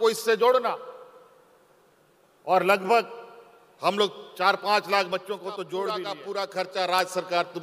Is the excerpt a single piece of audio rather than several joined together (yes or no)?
no